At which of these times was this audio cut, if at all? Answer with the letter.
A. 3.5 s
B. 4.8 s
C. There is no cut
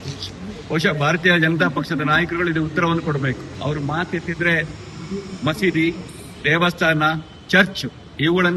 A